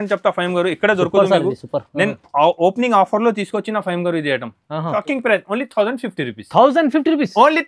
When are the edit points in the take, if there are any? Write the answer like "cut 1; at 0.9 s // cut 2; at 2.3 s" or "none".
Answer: cut 1; at 4.9 s

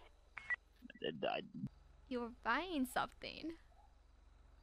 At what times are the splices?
cut 1; at 1.7 s

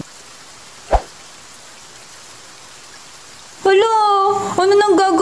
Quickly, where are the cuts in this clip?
none

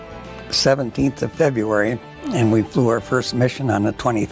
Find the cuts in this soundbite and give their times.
none

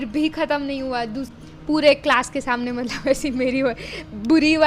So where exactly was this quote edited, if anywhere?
cut 1; at 1.3 s

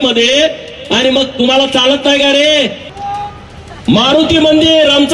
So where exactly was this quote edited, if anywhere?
cut 1; at 2.9 s

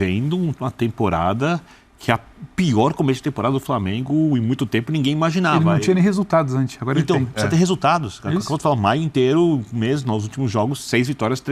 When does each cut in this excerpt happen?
none

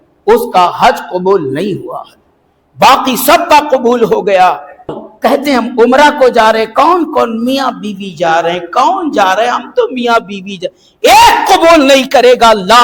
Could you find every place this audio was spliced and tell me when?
cut 1; at 5.0 s

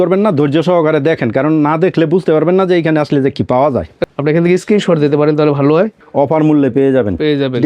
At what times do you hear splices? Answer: cut 1; at 4.0 s // cut 2; at 6.0 s

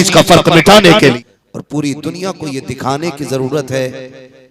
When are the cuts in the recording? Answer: cut 1; at 1.2 s

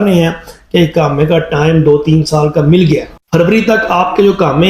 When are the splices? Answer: cut 1; at 3.2 s

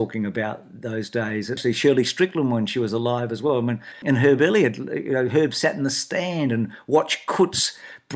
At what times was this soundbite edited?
cut 1; at 1.6 s // cut 2; at 3.9 s

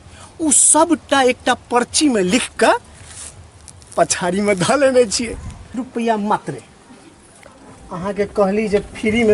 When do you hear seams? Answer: cut 1; at 5.8 s

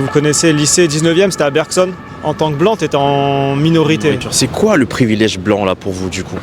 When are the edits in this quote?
cut 1; at 2.1 s // cut 2; at 4.2 s

